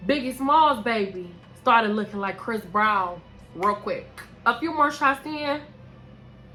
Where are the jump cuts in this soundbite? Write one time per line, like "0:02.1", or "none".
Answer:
none